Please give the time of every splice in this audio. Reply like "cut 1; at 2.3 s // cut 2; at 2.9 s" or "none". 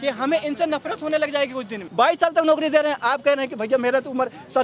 cut 1; at 1.8 s